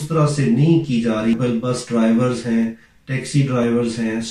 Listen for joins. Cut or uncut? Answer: cut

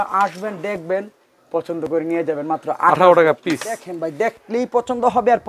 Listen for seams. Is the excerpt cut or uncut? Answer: cut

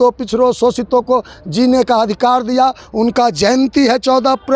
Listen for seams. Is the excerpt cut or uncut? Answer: uncut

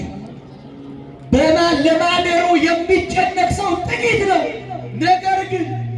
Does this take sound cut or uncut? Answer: uncut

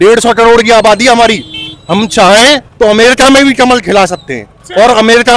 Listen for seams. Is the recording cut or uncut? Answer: uncut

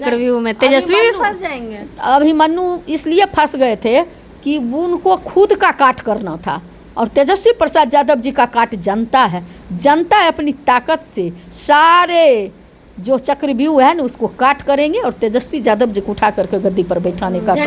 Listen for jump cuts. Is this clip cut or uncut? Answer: uncut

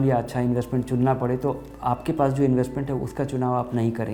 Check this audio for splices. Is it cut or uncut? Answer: uncut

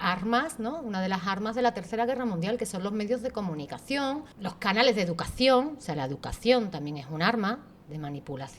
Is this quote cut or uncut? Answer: cut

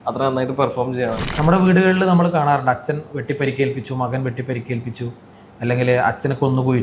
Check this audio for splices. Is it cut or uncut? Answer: cut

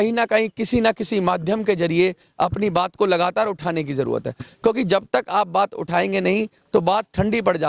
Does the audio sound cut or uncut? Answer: uncut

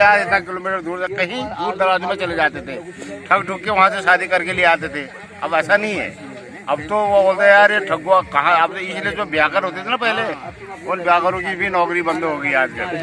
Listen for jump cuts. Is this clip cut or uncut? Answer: uncut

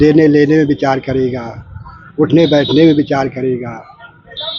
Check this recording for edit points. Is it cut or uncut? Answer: uncut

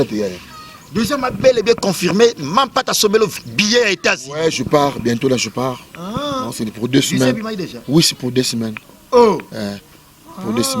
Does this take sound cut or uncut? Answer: cut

